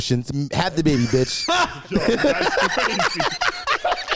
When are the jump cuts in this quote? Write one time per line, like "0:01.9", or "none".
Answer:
none